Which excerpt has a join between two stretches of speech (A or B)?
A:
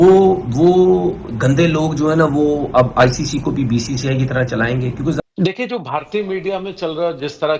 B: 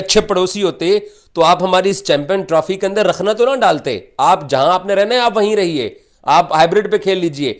A